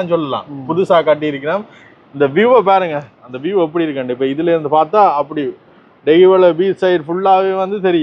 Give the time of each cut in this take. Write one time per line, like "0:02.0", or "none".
none